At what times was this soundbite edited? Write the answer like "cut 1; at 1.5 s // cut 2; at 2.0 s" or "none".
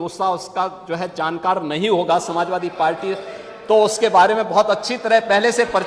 none